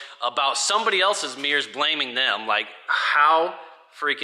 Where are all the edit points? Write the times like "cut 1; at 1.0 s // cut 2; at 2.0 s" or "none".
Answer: none